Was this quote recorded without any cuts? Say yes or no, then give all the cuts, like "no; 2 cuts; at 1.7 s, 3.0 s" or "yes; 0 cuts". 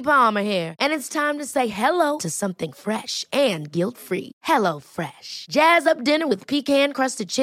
yes; 0 cuts